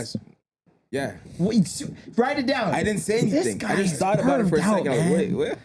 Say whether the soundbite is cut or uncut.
uncut